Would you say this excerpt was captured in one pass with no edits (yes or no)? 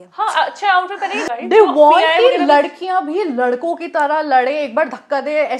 no